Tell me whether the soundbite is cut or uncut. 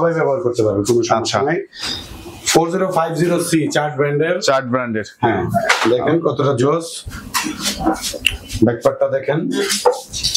uncut